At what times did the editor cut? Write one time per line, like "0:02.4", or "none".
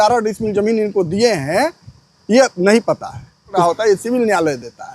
0:03.6